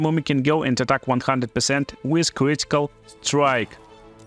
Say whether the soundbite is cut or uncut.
uncut